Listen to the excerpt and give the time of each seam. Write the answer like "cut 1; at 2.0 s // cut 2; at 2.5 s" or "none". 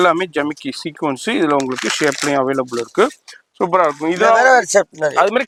none